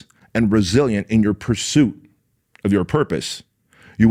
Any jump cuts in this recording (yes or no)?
no